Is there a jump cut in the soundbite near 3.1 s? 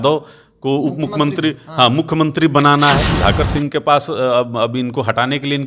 yes; 1 cut; at 3.1 s

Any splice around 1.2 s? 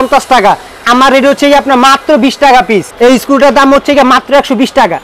no; 1 cut; at 2.9 s

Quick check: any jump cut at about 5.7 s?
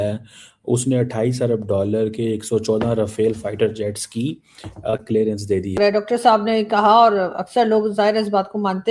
yes; 1 cut; at 5.7 s

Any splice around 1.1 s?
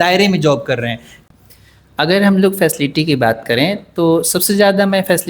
yes; 1 cut; at 1.1 s

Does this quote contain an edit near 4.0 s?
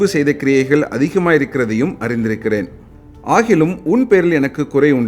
no; 1 cut; at 2.8 s

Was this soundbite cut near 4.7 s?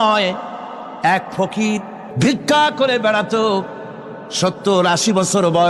no; 1 cut; at 2.0 s

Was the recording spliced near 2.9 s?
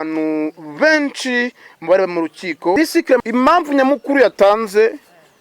yes; 1 cut; at 2.9 s

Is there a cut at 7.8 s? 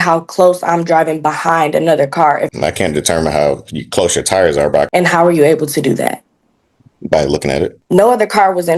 yes; 3 cuts; at 2.5 s, 4.9 s, 7.8 s

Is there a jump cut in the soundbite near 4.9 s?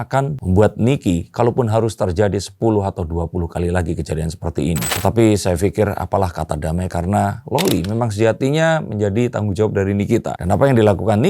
yes; 1 cut; at 4.9 s

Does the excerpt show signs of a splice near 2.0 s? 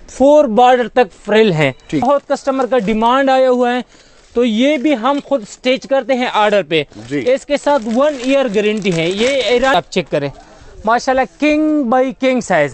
yes; 2 cuts; at 2.0 s, 9.7 s

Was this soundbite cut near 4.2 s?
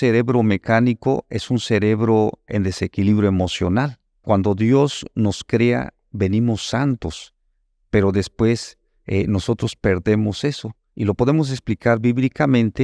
yes; 1 cut; at 4.2 s

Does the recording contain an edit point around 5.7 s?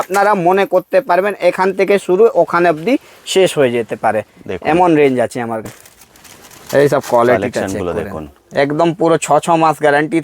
yes; 1 cut; at 5.7 s

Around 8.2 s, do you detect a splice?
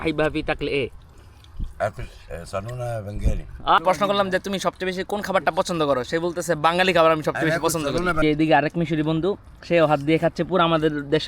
yes; 2 cuts; at 3.8 s, 8.2 s

